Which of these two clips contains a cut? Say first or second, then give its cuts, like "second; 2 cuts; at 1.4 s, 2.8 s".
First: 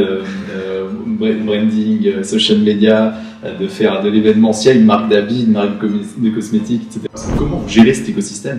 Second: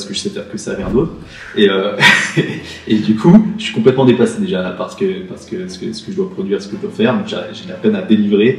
first; 1 cut; at 7.2 s